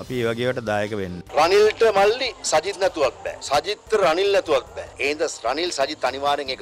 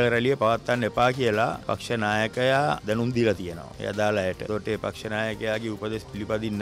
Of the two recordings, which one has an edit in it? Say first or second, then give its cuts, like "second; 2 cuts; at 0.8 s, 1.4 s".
first; 2 cuts; at 1.2 s, 4.8 s